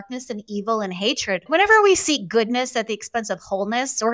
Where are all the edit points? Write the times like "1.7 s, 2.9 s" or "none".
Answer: 1.5 s